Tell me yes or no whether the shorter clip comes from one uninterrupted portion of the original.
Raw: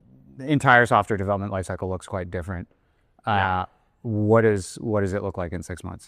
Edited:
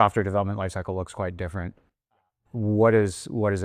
no